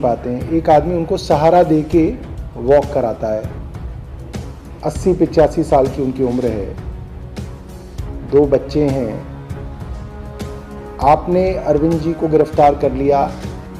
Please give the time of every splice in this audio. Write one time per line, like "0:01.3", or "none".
0:03.5
0:04.8
0:09.3
0:11.0